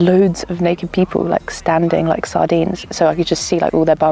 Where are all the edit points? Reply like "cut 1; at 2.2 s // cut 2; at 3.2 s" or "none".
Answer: cut 1; at 2.8 s